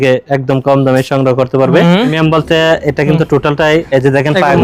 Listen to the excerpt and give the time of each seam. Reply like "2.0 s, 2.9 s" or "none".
2.1 s

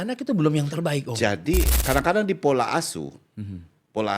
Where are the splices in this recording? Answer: 1.7 s

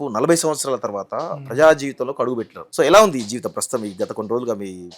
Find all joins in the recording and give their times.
2.6 s

